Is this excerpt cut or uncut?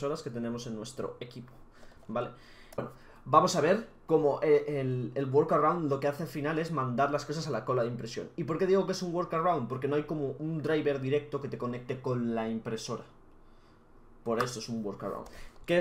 uncut